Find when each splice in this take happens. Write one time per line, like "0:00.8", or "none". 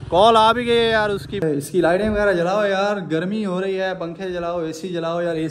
0:01.4